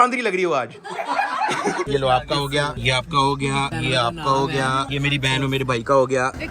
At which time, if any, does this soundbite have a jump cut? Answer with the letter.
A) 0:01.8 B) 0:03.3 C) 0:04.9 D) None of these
A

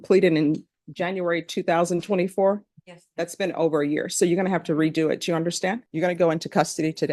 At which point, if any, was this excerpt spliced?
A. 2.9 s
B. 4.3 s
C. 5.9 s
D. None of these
C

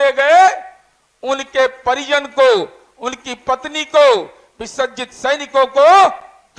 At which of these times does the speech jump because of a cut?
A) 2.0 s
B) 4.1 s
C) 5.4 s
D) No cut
D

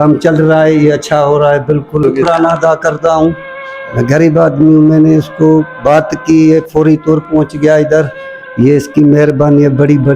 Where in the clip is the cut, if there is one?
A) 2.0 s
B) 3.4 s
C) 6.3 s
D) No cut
A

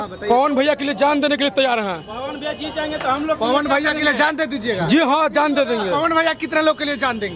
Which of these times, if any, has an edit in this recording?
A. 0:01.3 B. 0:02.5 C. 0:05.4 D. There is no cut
D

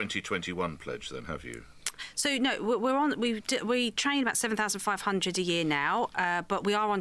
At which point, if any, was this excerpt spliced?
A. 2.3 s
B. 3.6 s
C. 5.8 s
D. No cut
D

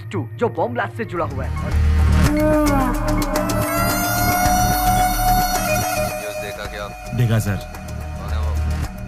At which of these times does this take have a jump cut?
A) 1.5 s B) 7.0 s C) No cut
A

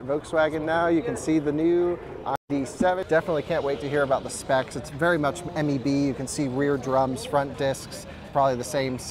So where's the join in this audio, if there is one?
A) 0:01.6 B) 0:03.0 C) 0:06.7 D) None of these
B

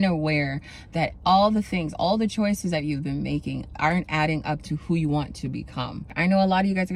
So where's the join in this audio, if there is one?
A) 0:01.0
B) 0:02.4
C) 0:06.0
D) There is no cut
C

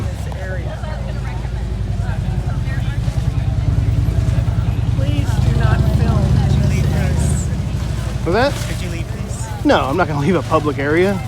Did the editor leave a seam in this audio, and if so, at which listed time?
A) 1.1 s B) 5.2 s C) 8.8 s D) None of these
D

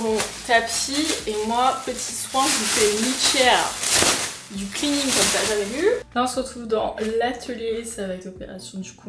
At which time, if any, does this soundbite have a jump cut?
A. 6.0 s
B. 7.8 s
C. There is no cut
A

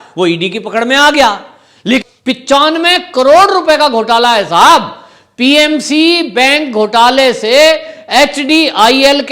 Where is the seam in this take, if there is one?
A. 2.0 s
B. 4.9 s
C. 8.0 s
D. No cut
A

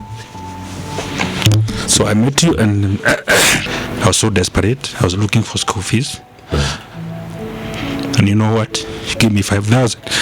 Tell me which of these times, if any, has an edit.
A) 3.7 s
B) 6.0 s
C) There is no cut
A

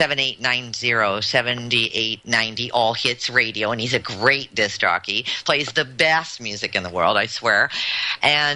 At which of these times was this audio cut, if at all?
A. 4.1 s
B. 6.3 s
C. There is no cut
A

